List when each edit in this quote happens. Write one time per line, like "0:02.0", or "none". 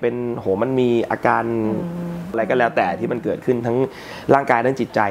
0:02.3